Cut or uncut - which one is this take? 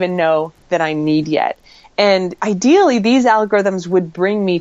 cut